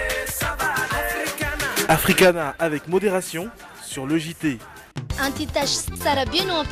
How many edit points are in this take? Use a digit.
1